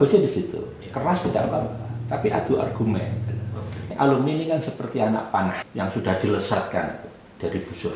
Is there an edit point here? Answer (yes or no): yes